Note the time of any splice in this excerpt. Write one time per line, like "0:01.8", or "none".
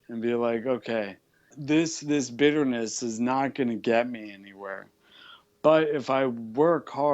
0:01.5